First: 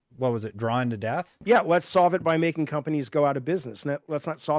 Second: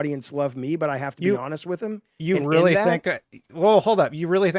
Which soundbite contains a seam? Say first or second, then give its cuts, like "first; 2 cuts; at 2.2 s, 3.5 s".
first; 1 cut; at 1.3 s